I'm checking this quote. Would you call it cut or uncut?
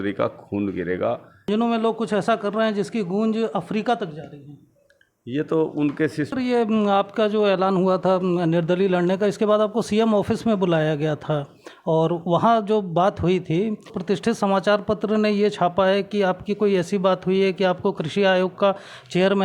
cut